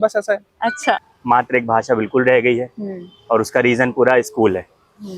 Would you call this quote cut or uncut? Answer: cut